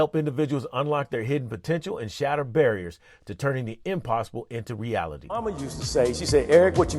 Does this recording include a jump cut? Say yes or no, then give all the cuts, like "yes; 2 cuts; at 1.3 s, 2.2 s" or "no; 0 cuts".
yes; 1 cut; at 5.2 s